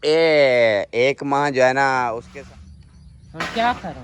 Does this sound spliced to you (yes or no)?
yes